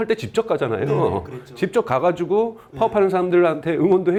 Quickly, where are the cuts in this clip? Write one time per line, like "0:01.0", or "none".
none